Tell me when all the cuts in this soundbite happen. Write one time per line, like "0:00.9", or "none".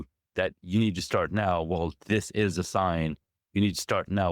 none